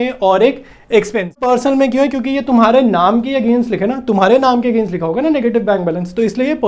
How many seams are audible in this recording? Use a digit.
1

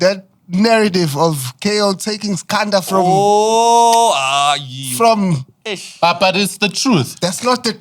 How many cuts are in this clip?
0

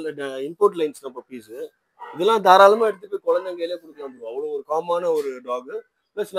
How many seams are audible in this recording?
0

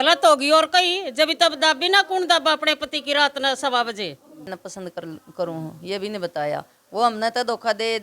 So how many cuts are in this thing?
1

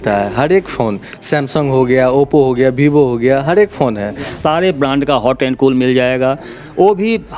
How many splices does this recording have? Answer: 1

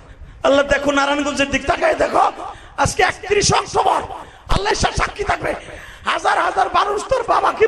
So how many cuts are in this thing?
1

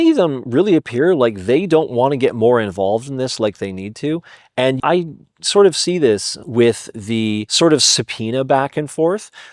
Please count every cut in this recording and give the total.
1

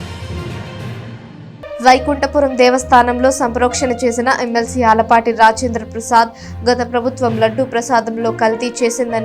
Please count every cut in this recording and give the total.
1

